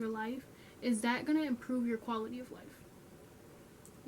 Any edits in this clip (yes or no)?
no